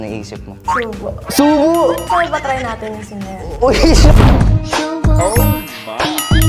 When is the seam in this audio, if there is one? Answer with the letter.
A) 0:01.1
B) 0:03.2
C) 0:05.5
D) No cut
D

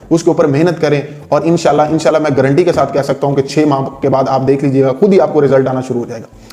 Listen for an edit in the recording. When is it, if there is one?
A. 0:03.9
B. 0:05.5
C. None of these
C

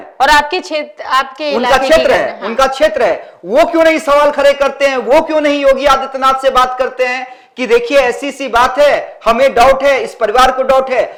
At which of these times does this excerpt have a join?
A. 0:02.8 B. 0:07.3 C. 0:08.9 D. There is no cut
D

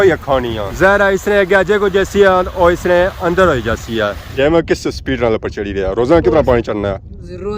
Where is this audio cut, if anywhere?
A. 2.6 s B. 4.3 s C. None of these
B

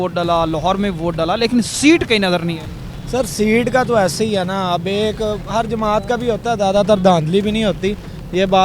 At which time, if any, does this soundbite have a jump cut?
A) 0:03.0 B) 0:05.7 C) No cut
C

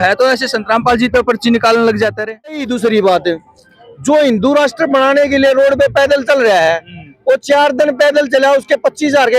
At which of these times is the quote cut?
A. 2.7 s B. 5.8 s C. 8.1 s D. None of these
A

